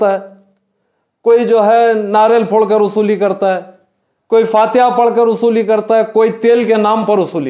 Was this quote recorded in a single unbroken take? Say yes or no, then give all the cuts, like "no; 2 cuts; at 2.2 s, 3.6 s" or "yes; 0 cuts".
yes; 0 cuts